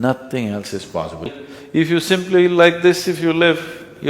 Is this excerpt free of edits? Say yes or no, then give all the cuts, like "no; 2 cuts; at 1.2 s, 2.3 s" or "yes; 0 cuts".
no; 1 cut; at 1.4 s